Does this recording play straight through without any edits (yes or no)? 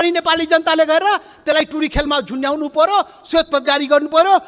yes